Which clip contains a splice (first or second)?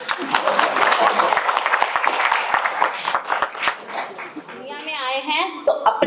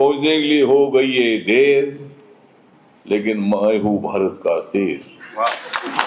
first